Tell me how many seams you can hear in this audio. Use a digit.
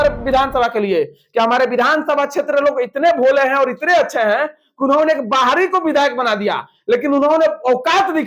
0